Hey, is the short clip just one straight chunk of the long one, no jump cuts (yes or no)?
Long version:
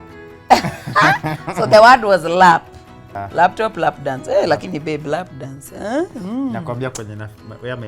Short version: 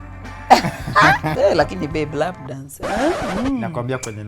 no